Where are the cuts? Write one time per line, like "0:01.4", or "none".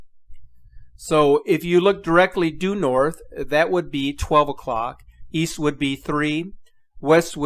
0:01.2